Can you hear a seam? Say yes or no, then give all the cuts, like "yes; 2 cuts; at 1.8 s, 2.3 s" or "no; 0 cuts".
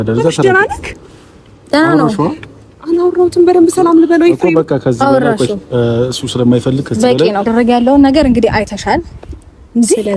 yes; 1 cut; at 7.5 s